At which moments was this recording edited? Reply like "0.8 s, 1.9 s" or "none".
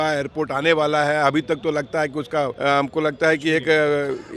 2.5 s

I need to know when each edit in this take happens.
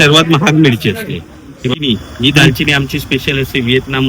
1.8 s

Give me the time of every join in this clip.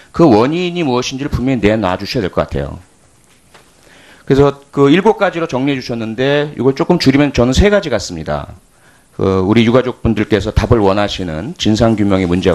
7.5 s

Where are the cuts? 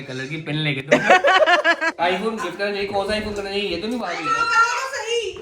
1.9 s

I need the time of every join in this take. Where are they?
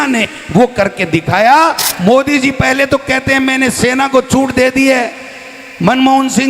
1.8 s

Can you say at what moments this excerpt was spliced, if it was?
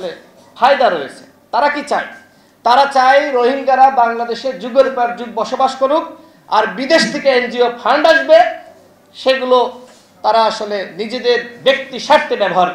none

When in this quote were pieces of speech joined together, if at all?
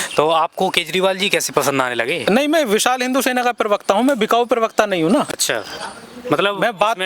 none

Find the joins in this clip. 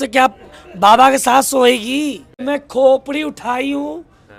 2.3 s

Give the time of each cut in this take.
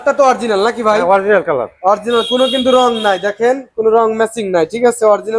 none

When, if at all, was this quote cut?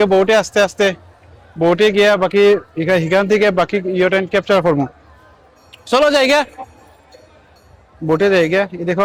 none

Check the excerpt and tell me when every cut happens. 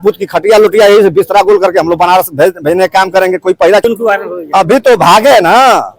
3.8 s

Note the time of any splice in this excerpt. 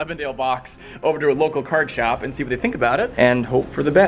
3.1 s

